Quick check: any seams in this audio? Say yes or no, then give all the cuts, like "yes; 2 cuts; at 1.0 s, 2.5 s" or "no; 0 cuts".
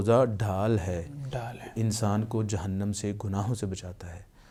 no; 0 cuts